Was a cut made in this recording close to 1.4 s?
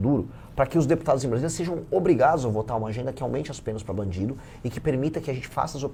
no; 0 cuts

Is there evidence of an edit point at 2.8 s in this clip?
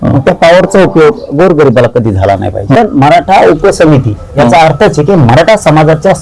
yes; 1 cut; at 2.8 s

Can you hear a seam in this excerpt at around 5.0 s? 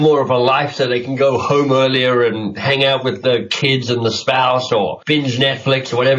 yes; 1 cut; at 5.0 s

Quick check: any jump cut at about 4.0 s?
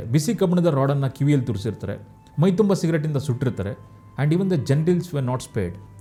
no; 0 cuts

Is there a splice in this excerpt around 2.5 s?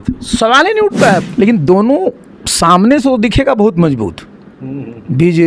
no; 1 cut; at 1.2 s

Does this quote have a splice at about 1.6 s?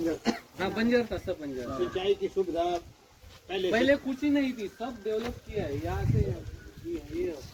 no; 0 cuts

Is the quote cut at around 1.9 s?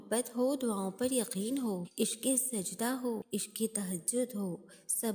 yes; 2 cuts; at 1.9 s, 3.2 s

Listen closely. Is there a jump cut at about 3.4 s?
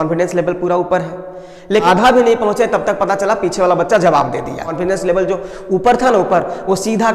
no; 2 cuts; at 1.8 s, 4.7 s

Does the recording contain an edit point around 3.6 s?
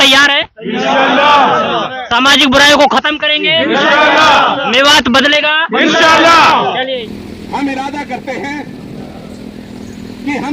no; 1 cut; at 6.9 s

